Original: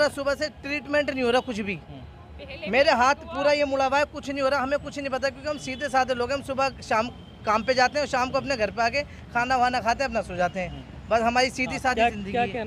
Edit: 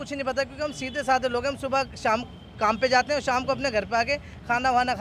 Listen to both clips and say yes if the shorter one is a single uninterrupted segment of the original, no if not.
yes